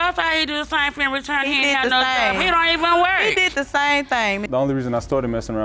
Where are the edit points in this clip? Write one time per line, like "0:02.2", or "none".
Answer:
0:04.5